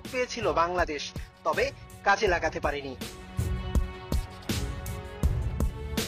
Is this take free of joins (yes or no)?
no